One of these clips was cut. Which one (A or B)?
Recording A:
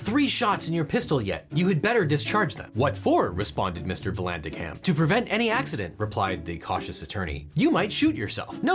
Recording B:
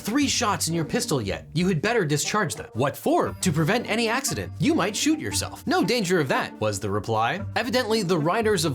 B